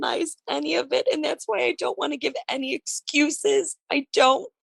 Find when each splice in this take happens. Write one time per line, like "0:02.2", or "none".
none